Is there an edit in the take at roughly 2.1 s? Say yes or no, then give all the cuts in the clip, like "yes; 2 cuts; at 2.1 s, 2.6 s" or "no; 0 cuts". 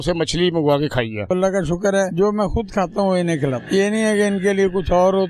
yes; 3 cuts; at 1.3 s, 2.1 s, 3.6 s